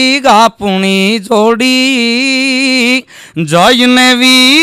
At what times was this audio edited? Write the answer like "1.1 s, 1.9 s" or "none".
none